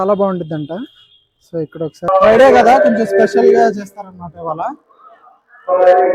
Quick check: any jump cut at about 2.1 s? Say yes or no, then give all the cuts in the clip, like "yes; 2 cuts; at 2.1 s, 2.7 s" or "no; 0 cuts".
yes; 1 cut; at 2.1 s